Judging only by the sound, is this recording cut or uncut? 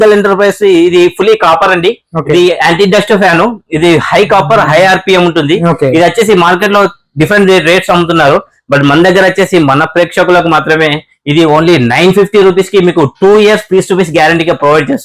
uncut